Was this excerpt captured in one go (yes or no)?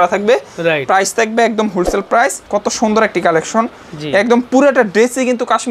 no